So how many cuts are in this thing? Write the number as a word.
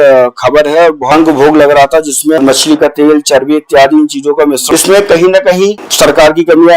four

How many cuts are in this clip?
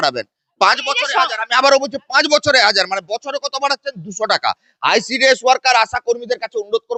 zero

